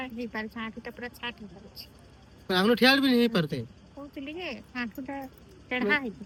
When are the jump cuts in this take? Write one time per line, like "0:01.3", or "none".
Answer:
none